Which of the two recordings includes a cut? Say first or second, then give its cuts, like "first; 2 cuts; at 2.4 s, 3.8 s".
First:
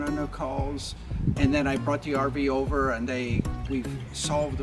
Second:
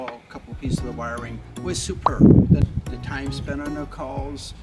second; 1 cut; at 2.6 s